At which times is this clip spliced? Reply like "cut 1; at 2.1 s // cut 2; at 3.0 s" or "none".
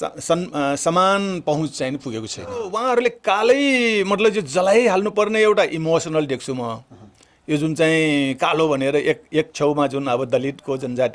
cut 1; at 2.8 s